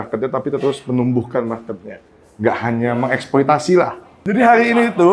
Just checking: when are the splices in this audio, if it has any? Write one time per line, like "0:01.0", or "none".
0:04.1